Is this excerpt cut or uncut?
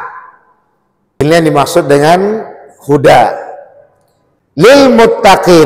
cut